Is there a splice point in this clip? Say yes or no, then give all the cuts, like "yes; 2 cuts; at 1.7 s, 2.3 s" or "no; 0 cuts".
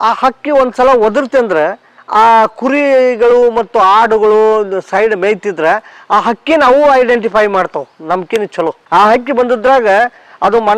yes; 1 cut; at 8.8 s